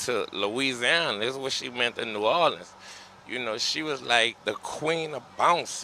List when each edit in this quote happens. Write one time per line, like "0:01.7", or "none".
0:04.4